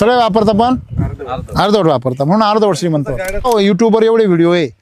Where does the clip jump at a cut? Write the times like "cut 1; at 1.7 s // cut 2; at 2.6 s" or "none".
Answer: cut 1; at 3.4 s